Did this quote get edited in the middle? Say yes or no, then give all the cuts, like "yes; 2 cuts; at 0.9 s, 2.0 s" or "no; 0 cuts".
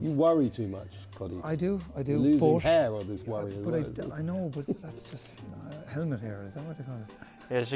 no; 0 cuts